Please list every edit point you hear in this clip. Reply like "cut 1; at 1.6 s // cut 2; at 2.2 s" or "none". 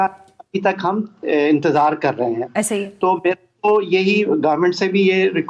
none